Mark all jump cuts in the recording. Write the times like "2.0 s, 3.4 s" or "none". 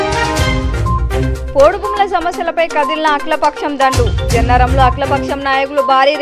1.3 s